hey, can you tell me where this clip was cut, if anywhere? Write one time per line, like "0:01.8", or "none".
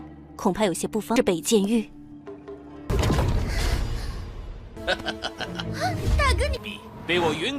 0:02.9

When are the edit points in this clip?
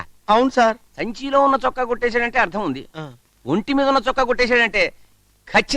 none

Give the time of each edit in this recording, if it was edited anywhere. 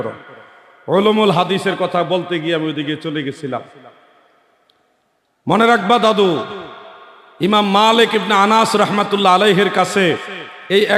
none

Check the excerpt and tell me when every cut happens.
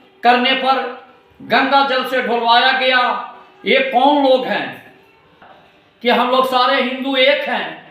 0:05.4

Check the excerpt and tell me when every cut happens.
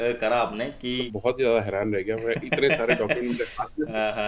0:01.1

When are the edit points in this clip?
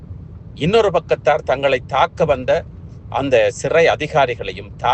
none

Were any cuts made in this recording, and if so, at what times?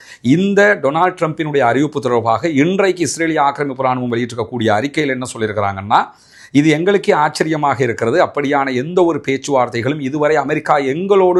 none

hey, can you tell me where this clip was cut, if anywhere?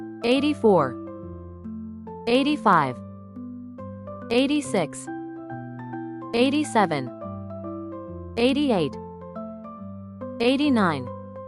none

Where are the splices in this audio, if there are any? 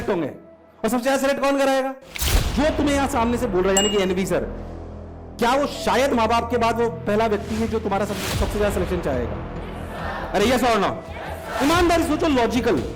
0:02.4

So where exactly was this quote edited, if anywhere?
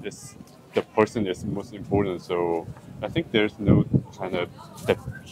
none

